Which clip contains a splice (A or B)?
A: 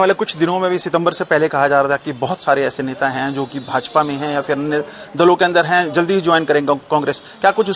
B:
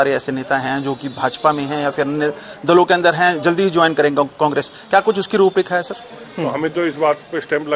B